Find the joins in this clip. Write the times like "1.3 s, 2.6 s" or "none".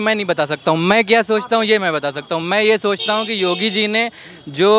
none